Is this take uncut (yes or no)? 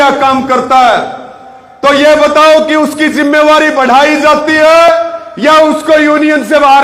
yes